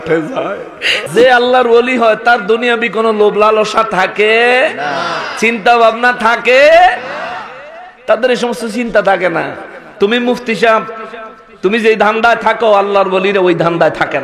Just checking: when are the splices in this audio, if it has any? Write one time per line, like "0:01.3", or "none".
0:01.0

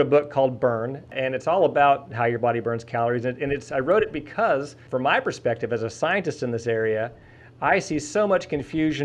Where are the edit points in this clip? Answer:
0:01.1
0:04.8

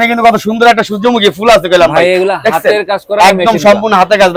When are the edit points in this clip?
none

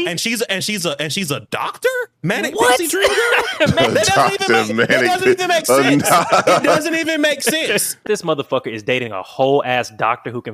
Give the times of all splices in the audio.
0:03.8
0:08.0

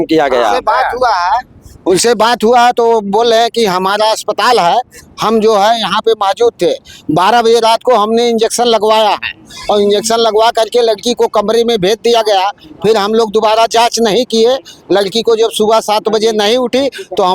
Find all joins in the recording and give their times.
none

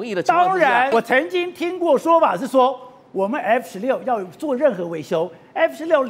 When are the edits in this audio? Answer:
0:00.9

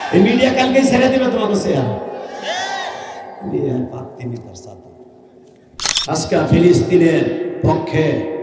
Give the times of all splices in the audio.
0:05.9

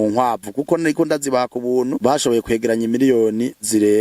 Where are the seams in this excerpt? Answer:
0:02.0

